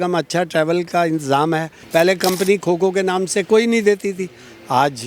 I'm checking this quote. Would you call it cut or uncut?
cut